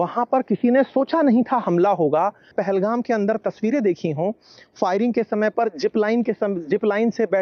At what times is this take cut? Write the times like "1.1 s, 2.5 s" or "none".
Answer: 2.6 s